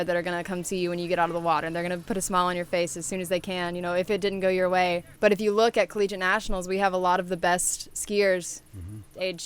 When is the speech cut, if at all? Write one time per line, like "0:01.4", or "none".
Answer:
0:05.1